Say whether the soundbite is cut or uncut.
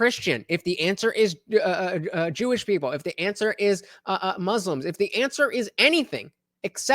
uncut